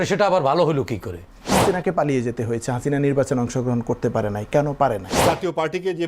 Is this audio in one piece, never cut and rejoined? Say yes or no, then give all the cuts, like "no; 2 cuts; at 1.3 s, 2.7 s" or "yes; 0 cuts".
no; 2 cuts; at 1.5 s, 5.1 s